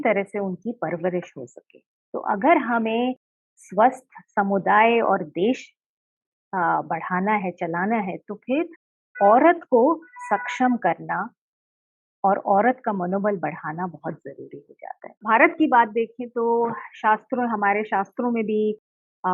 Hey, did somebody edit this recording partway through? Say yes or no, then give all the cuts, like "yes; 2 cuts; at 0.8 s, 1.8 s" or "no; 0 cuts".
yes; 1 cut; at 15.2 s